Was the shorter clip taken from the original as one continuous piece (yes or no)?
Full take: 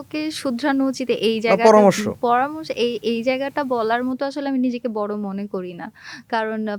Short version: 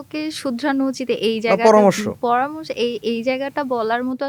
yes